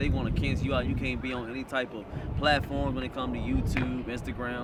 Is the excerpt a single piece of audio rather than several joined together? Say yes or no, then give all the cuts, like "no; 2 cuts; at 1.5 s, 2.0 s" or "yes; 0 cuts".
yes; 0 cuts